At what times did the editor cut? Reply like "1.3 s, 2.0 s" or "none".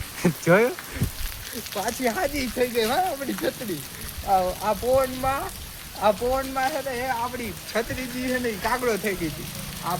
none

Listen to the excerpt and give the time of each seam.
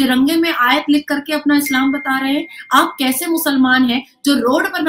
none

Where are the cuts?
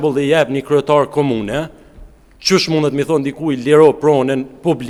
none

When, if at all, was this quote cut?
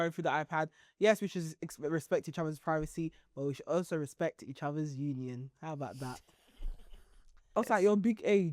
7.5 s

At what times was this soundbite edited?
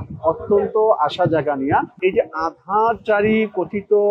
1.9 s

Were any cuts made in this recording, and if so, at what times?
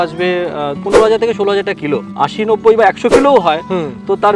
0.8 s, 2.0 s

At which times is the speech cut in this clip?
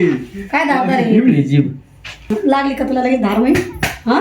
2.2 s

